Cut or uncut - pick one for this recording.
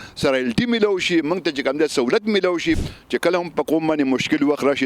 cut